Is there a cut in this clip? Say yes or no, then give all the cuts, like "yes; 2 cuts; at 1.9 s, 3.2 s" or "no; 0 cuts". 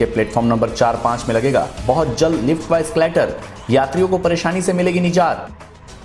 no; 0 cuts